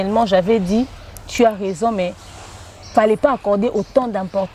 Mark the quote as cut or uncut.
uncut